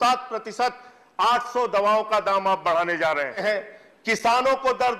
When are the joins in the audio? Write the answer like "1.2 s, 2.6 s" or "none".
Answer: 3.4 s

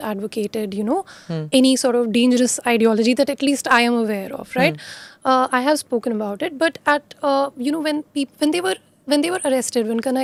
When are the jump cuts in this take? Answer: none

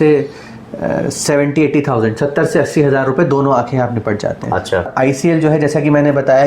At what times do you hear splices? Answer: 4.9 s

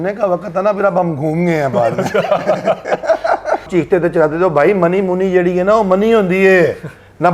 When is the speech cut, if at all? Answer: 3.7 s

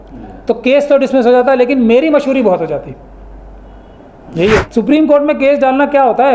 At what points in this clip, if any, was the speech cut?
4.6 s

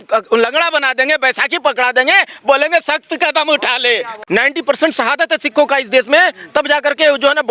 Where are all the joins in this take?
4.1 s

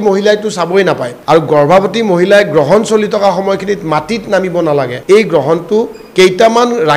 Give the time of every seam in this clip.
1.1 s, 5.0 s

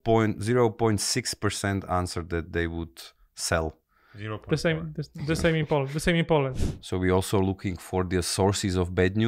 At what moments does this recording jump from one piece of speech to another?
6.5 s

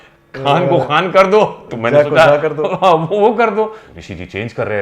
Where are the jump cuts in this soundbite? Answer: 3.8 s

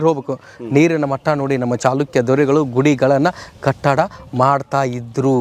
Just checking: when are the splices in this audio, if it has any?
none

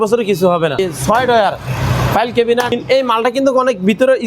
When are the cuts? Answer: 0.8 s, 2.7 s

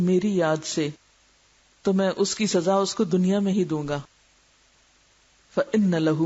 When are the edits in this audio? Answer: 4.8 s

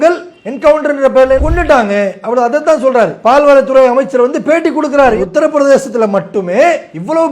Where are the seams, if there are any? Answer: 1.5 s

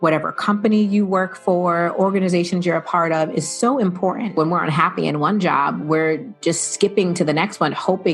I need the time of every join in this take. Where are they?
4.3 s

